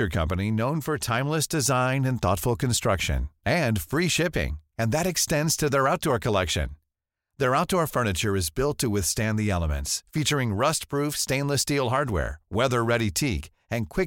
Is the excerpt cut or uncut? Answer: uncut